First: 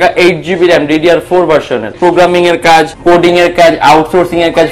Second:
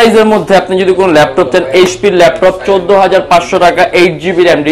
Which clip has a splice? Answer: first; 2 cuts; at 1.9 s, 2.9 s

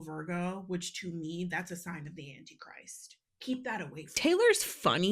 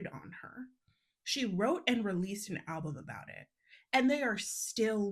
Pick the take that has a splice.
first; 1 cut; at 4.1 s

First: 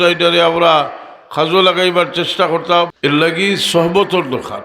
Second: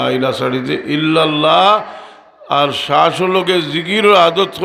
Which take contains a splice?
first; 1 cut; at 2.9 s

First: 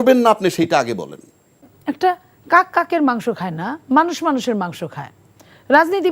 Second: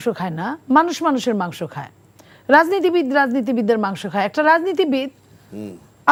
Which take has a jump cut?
first; 1 cut; at 1.7 s

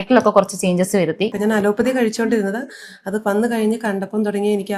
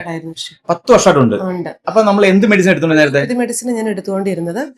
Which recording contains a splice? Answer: first; 1 cut; at 1.3 s

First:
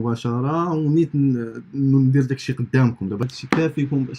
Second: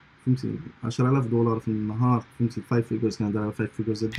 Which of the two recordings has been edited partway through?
first; 1 cut; at 3.2 s

